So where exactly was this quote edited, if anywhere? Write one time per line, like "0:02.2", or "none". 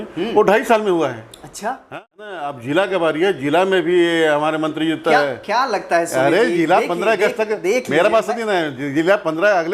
0:01.8